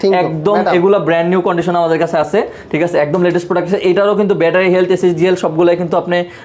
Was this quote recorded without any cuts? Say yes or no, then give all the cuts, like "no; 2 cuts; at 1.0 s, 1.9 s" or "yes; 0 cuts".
yes; 0 cuts